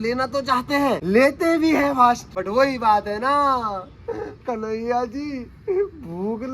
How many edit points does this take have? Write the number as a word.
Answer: two